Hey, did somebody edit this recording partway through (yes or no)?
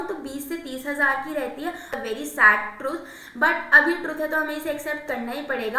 yes